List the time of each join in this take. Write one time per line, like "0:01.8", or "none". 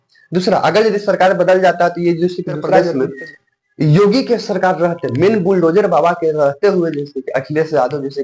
0:02.9